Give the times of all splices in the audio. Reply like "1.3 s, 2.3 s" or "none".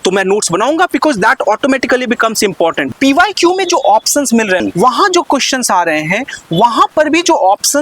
2.9 s, 4.6 s